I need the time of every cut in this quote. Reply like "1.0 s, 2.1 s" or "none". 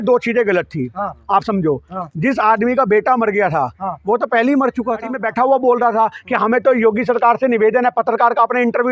5.2 s